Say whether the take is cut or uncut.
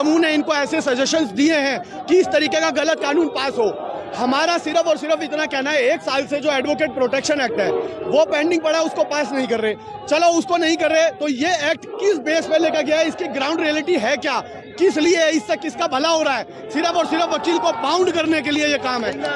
uncut